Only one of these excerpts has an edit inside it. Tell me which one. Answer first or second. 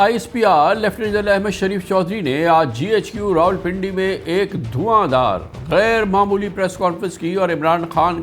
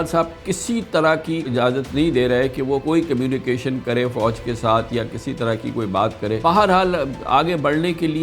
second